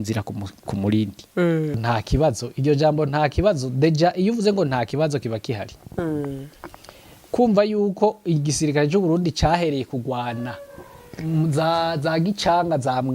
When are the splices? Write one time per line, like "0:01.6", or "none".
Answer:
0:01.8